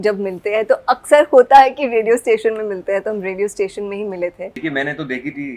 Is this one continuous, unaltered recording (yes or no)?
no